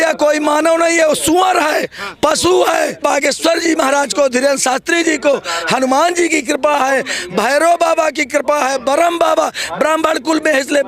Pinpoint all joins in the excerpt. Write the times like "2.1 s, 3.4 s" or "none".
3.0 s